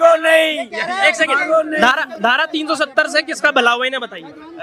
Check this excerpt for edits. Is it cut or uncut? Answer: uncut